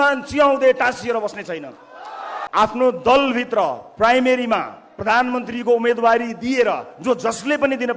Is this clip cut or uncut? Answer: cut